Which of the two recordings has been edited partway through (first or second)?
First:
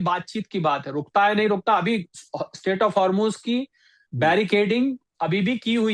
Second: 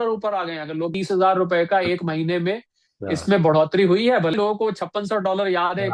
second